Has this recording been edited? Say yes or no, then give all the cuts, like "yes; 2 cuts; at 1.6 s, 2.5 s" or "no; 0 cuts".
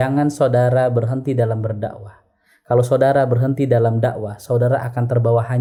no; 0 cuts